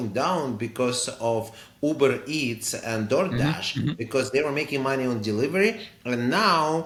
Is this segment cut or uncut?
uncut